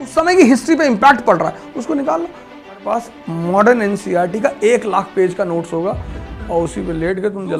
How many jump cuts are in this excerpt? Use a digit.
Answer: 1